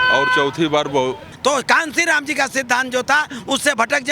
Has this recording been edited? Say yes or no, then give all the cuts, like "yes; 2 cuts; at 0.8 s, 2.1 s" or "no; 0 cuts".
yes; 1 cut; at 1.3 s